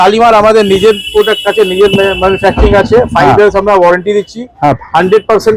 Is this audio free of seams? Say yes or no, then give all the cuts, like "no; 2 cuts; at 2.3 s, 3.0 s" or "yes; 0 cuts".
yes; 0 cuts